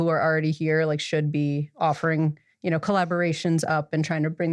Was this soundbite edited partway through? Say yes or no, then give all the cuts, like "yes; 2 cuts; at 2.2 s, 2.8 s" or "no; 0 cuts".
no; 0 cuts